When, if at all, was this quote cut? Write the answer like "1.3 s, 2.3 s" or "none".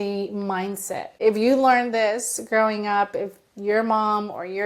1.0 s